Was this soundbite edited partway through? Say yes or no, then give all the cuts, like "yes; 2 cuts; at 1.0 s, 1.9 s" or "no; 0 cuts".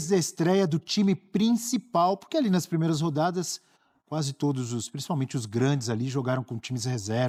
no; 0 cuts